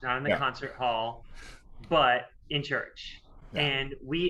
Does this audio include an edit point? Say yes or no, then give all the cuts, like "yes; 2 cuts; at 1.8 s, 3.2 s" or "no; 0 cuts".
no; 0 cuts